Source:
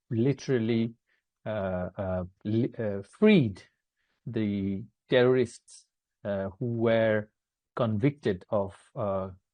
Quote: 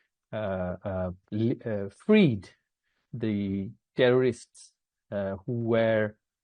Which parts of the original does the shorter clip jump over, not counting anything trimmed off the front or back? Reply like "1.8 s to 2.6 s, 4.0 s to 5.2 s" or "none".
none